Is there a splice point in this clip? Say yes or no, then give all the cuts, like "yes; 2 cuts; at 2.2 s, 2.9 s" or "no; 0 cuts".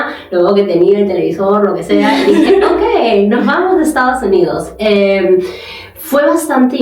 no; 0 cuts